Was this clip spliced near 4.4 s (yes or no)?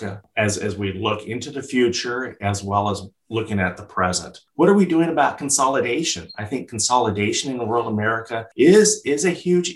yes